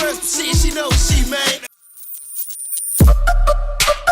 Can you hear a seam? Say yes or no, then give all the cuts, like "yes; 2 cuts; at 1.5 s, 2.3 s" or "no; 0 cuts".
yes; 1 cut; at 1.9 s